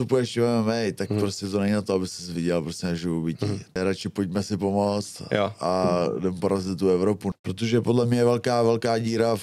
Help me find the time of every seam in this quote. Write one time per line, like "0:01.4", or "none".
0:03.8
0:07.3

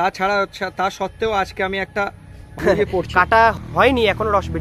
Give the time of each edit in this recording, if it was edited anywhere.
0:02.6
0:03.6

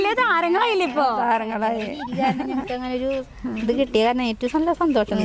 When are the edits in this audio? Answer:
none

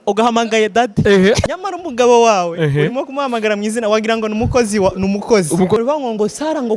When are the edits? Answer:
0:01.5
0:05.8

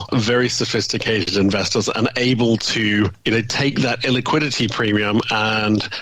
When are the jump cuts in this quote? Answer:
0:01.3

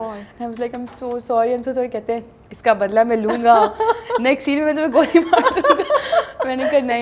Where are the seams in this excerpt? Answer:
none

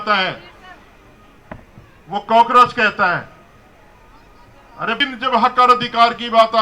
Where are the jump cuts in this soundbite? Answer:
0:05.0

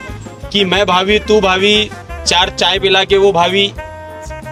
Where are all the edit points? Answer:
none

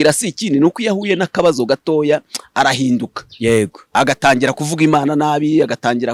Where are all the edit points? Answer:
none

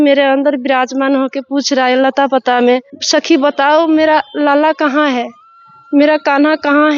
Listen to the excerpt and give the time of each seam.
0:02.9

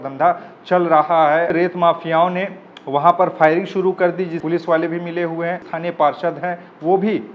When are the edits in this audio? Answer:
0:01.5
0:04.4
0:05.7

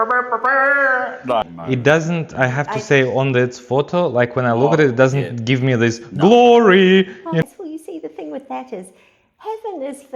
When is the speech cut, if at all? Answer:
0:01.4
0:07.4

